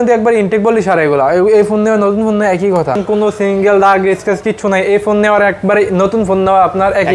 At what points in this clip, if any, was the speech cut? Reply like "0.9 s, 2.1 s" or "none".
3.0 s